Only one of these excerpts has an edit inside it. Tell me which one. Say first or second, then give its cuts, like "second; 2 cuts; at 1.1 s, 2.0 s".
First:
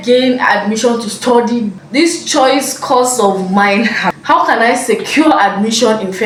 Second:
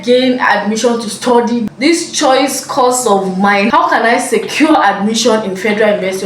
second; 2 cuts; at 1.7 s, 3.7 s